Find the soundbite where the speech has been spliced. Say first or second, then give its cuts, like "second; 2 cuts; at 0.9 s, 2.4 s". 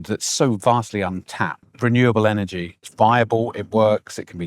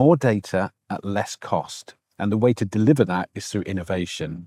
first; 2 cuts; at 1.7 s, 2.8 s